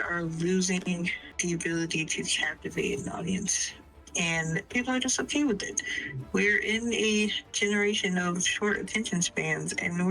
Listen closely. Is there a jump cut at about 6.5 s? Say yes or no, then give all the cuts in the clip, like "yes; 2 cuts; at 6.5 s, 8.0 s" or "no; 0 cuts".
no; 1 cut; at 1.2 s